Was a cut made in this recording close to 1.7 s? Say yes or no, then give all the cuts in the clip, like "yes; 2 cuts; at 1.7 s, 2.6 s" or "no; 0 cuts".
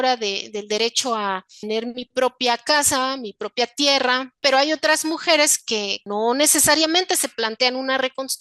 yes; 3 cuts; at 1.7 s, 4.4 s, 6.0 s